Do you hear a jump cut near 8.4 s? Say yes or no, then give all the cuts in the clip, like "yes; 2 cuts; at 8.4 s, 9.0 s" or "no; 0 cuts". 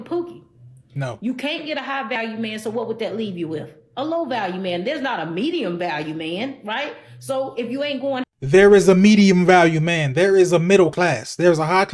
yes; 1 cut; at 8.4 s